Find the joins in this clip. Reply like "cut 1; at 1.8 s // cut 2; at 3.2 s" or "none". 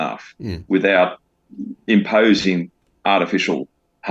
none